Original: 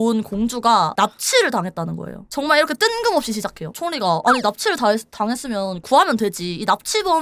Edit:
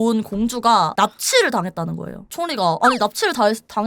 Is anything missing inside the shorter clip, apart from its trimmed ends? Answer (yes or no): yes